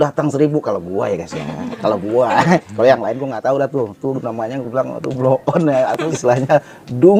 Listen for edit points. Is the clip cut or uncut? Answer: cut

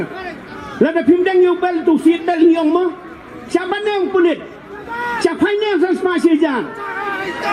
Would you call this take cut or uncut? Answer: uncut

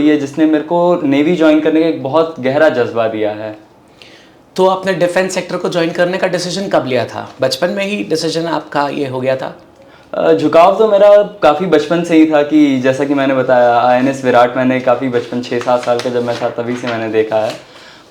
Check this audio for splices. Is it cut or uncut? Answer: uncut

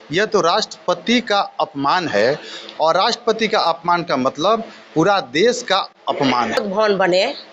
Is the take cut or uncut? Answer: cut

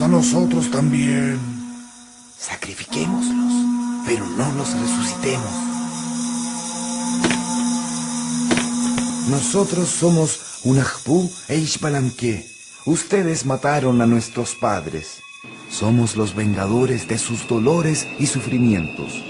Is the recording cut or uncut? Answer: uncut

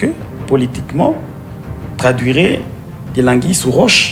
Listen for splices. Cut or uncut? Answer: uncut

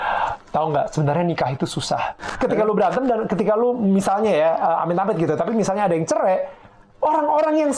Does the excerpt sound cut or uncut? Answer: cut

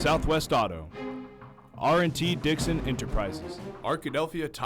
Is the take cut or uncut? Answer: cut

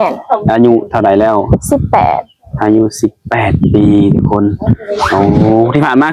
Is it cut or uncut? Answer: uncut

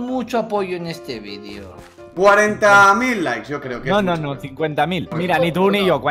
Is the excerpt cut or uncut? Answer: cut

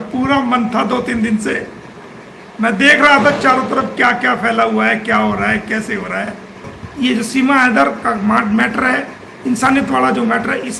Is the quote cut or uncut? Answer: cut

